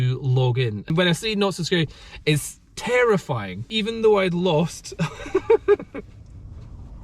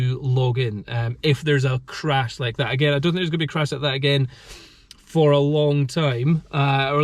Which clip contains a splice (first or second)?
first